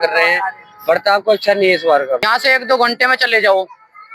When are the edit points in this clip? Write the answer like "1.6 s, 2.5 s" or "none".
2.2 s